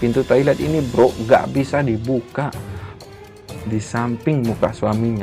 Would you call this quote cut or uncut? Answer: cut